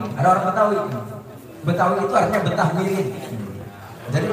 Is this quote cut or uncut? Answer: uncut